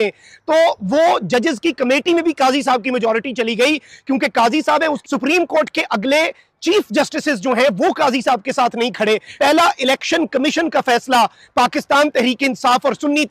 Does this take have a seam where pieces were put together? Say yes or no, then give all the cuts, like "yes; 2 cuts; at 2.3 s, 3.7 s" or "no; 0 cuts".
yes; 2 cuts; at 5.0 s, 9.3 s